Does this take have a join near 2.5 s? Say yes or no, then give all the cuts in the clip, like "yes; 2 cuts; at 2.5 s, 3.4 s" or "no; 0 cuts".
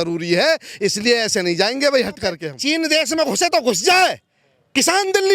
yes; 1 cut; at 2.5 s